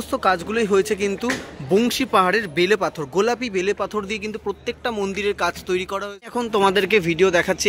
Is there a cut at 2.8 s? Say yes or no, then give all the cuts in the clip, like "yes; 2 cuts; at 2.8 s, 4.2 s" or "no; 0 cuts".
no; 1 cut; at 6.5 s